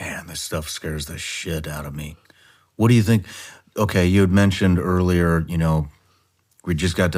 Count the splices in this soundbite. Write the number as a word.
zero